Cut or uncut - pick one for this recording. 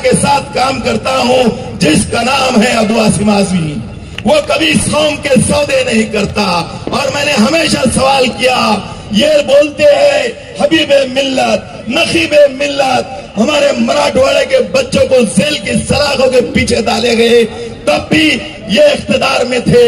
cut